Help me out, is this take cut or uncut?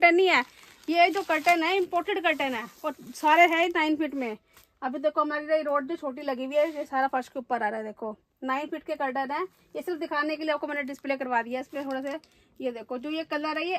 uncut